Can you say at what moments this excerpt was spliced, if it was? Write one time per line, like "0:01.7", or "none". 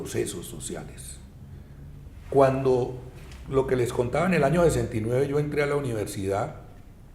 0:03.0